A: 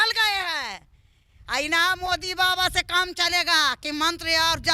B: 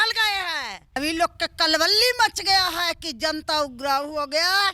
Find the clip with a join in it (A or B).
B